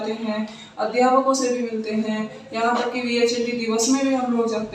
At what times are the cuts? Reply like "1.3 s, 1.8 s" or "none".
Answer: none